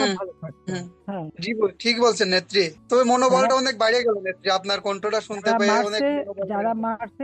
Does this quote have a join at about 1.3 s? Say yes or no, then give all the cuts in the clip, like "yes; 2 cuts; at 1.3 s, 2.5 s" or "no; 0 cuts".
yes; 1 cut; at 1.3 s